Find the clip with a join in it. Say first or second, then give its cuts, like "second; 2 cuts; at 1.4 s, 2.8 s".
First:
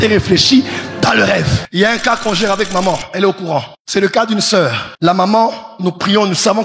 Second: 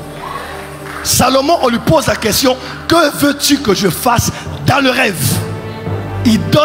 first; 3 cuts; at 1.6 s, 3.8 s, 4.9 s